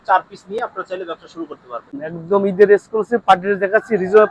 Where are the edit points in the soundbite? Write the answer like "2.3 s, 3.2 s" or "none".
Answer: 1.9 s